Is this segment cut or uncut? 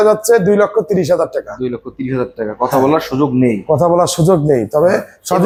uncut